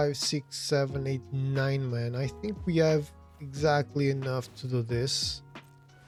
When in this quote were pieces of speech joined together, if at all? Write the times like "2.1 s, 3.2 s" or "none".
none